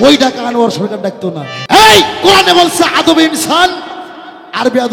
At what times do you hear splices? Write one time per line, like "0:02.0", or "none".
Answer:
0:01.5